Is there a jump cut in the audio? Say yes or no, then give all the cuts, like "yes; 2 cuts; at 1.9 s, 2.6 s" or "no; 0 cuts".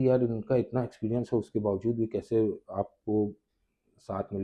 no; 0 cuts